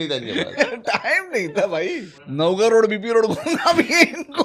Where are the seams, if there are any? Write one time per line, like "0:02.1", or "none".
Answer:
0:02.3